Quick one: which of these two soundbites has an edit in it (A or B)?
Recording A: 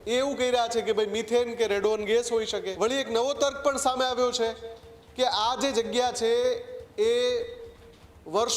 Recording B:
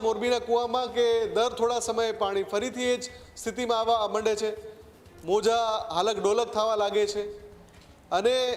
A